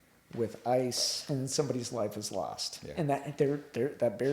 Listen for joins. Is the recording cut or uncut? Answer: cut